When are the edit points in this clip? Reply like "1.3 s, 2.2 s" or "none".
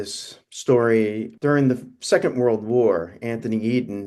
1.3 s